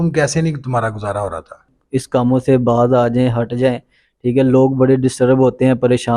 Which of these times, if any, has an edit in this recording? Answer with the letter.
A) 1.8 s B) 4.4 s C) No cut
A